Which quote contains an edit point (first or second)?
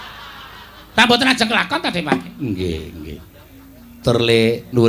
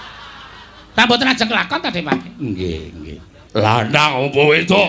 second